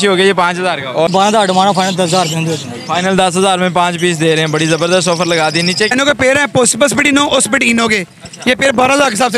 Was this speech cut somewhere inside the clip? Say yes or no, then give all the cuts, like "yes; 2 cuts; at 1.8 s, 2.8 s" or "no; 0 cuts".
yes; 2 cuts; at 1.1 s, 5.9 s